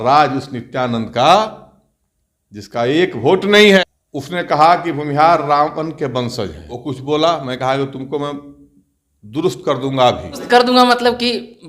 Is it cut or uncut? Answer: cut